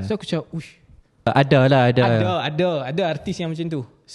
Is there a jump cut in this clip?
yes; 1 cut; at 1.3 s

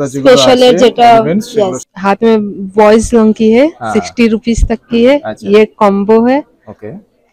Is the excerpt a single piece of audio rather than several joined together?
no; 1 cut; at 1.9 s

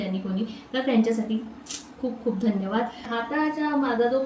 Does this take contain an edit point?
yes; 1 cut; at 3.1 s

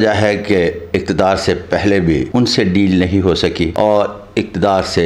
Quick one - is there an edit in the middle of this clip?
yes; 2 cuts; at 2.3 s, 3.7 s

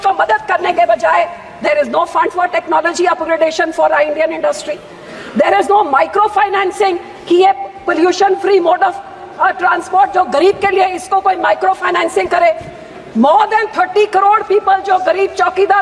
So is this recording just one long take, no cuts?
yes; 0 cuts

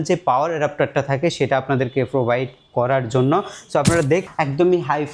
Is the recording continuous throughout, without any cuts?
no; 1 cut; at 4.2 s

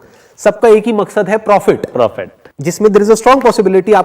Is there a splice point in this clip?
yes; 1 cut; at 2.0 s

